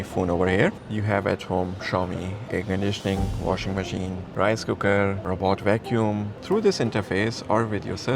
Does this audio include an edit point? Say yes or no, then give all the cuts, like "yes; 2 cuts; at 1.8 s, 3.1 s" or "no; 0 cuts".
yes; 4 cuts; at 0.8 s, 4.2 s, 5.2 s, 6.3 s